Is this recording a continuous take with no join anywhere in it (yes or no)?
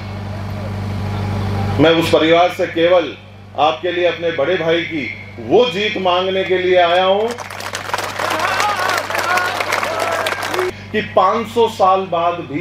no